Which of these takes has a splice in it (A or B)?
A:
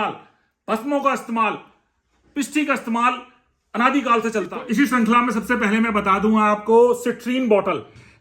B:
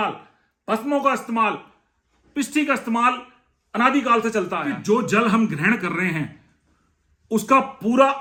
A